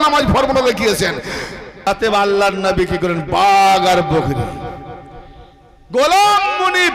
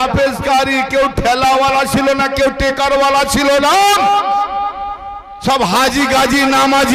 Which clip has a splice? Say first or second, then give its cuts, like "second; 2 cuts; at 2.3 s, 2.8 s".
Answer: first; 1 cut; at 1.9 s